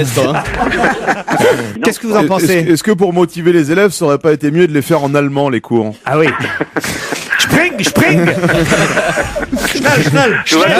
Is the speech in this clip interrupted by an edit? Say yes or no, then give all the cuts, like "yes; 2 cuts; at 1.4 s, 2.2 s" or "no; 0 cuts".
no; 0 cuts